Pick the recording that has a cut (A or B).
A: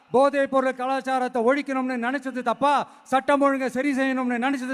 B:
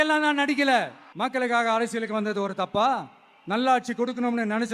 B